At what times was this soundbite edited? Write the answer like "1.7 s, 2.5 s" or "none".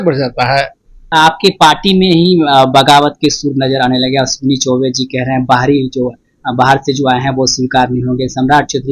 1.0 s